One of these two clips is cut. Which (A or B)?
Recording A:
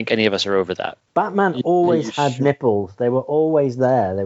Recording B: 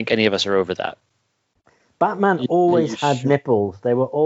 A